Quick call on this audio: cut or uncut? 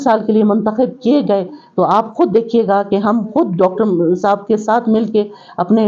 uncut